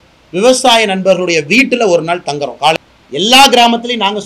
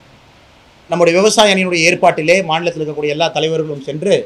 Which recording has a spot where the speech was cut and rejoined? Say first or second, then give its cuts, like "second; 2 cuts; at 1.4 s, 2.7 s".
first; 1 cut; at 2.7 s